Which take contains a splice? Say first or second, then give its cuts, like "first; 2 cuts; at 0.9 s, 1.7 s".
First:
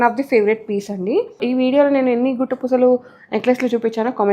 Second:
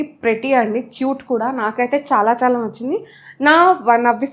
first; 1 cut; at 1.4 s